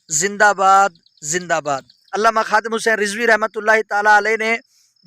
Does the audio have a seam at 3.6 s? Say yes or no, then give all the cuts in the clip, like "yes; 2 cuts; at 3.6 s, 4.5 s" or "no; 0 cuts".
no; 1 cut; at 1.9 s